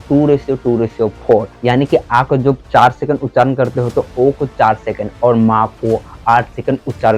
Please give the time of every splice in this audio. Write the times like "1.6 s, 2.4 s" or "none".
none